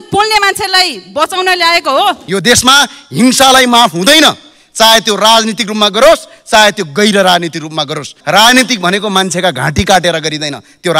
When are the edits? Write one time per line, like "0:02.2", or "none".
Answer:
0:02.2
0:08.1